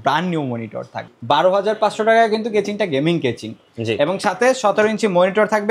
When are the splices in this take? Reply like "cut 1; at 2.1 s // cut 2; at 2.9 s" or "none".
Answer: cut 1; at 1.0 s